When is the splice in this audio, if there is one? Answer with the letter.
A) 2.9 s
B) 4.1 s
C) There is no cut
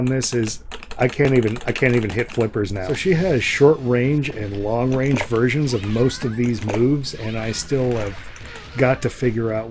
A